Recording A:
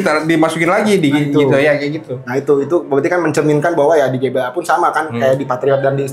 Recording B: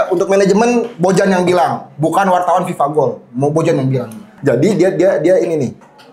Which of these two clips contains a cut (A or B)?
B